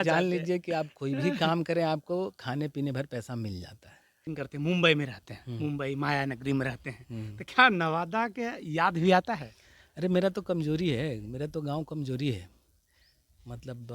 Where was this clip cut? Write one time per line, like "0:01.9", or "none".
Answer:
0:04.2